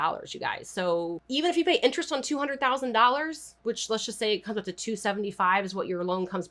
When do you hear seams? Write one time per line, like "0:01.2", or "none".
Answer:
0:01.2
0:03.4